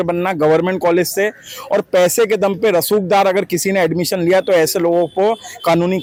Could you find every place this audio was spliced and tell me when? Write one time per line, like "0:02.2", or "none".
none